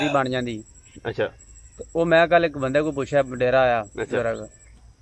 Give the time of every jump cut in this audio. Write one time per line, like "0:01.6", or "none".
0:01.2